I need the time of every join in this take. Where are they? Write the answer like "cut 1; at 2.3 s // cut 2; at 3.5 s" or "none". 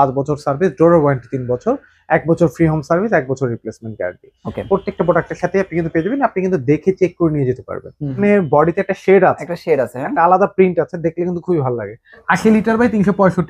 cut 1; at 8.2 s // cut 2; at 12.2 s